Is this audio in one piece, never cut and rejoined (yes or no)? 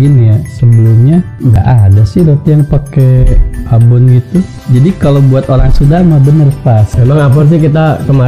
no